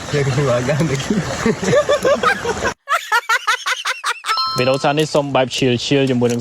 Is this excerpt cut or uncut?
cut